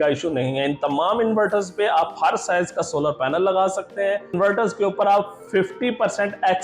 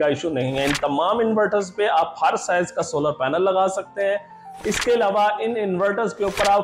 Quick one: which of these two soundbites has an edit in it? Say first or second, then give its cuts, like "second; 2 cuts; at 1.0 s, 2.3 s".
first; 1 cut; at 4.3 s